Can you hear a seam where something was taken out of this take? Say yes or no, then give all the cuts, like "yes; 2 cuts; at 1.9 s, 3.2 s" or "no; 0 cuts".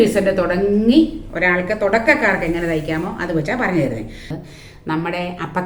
yes; 1 cut; at 4.2 s